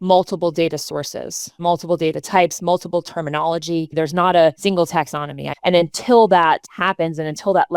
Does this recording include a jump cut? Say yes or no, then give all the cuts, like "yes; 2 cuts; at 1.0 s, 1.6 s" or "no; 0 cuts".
yes; 4 cuts; at 1.6 s, 3.9 s, 5.2 s, 6.7 s